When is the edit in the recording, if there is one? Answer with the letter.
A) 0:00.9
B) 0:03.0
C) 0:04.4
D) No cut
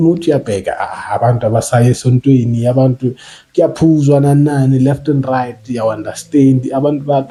D